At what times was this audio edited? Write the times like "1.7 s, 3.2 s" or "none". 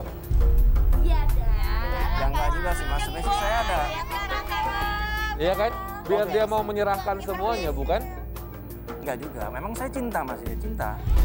none